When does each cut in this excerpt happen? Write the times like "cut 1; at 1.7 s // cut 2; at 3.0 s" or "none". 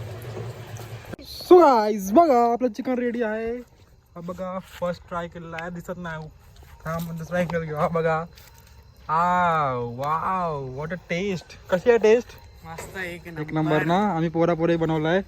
cut 1; at 1.1 s